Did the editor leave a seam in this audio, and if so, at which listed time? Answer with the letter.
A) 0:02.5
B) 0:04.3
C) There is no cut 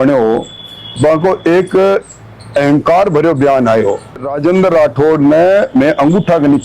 B